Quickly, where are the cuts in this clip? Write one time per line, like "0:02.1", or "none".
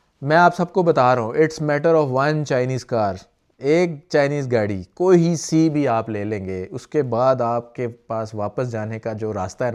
none